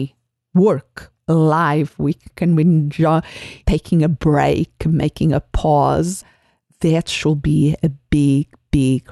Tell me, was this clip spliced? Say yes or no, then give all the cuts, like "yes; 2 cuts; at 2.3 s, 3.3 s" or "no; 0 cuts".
yes; 1 cut; at 1.1 s